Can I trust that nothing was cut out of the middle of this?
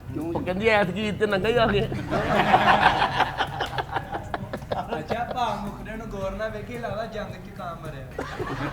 yes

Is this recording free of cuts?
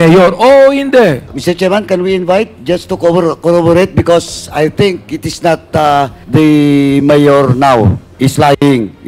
no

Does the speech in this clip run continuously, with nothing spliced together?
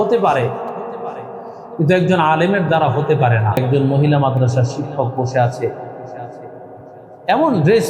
no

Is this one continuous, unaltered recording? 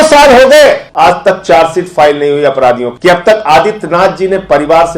no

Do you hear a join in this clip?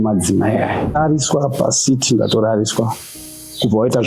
yes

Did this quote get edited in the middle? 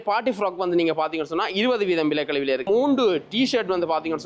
yes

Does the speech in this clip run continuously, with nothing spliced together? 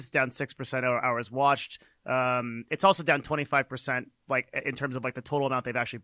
yes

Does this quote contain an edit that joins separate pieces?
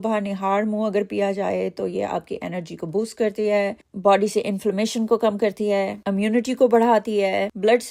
no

